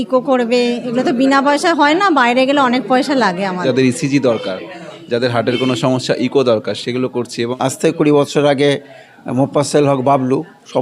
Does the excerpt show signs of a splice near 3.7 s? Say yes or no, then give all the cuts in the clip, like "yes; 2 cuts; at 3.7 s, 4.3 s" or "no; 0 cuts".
yes; 2 cuts; at 3.7 s, 7.3 s